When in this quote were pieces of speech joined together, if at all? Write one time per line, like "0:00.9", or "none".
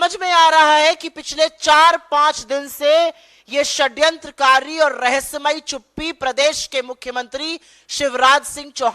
none